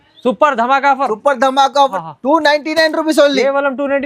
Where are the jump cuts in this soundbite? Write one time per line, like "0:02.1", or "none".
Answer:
0:02.0